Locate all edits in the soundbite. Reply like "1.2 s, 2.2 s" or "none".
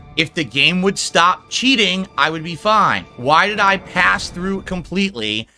none